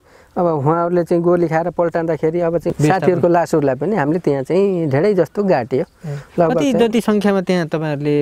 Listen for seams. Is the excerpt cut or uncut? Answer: cut